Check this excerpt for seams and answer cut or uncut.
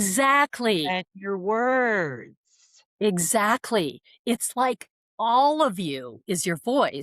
uncut